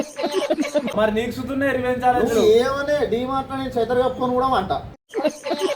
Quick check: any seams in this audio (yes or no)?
yes